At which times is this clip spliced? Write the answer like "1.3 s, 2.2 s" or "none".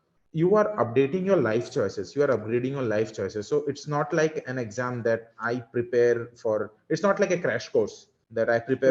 none